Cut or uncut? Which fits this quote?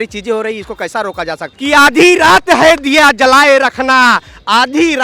cut